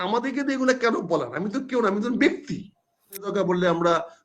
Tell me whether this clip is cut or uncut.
cut